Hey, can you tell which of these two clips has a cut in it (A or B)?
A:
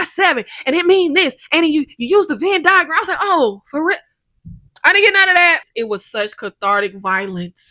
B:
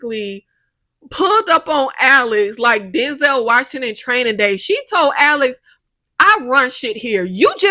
A